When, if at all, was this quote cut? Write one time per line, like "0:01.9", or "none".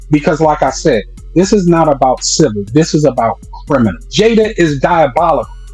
0:04.0